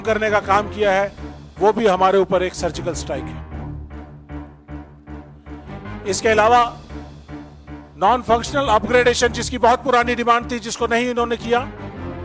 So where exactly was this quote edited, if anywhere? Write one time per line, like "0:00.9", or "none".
0:03.9
0:05.9